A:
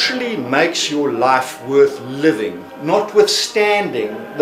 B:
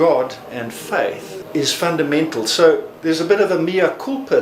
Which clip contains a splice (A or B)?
B